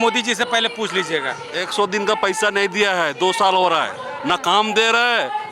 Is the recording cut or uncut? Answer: cut